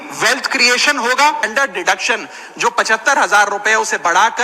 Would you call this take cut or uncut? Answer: cut